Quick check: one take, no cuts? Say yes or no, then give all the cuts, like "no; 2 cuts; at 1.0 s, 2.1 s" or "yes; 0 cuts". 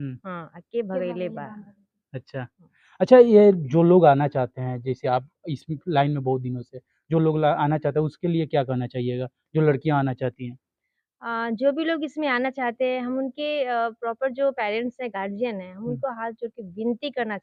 yes; 0 cuts